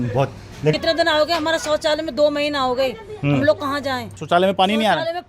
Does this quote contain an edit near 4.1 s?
yes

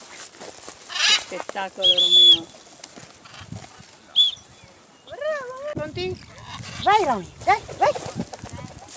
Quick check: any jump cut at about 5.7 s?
yes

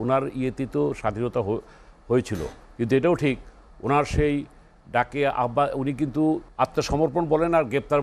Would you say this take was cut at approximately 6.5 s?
yes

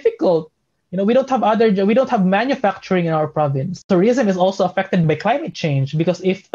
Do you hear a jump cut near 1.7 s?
no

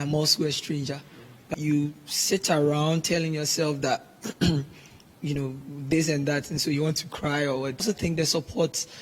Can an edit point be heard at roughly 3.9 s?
no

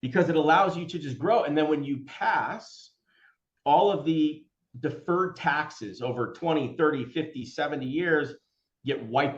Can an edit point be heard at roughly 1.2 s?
yes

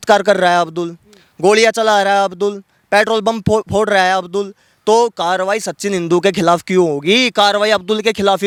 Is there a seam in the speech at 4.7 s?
no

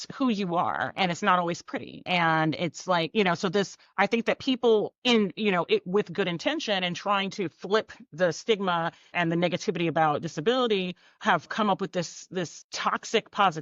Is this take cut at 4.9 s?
yes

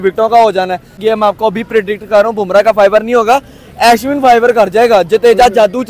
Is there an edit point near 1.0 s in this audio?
yes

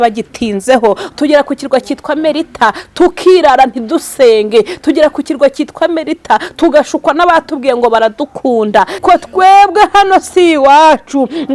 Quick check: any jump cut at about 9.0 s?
yes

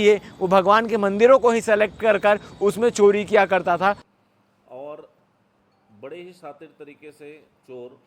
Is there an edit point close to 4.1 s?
yes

